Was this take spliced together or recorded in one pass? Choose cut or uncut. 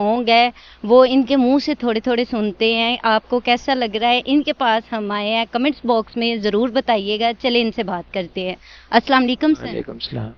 uncut